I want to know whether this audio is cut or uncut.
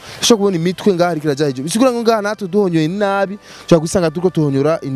uncut